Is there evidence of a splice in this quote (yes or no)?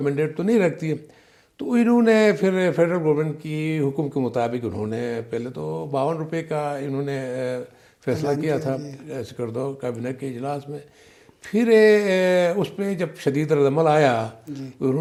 no